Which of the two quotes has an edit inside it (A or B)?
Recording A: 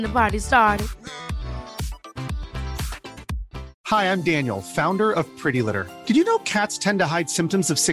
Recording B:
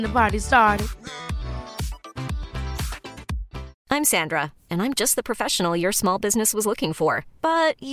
B